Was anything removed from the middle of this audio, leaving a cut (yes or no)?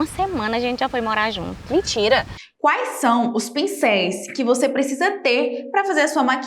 yes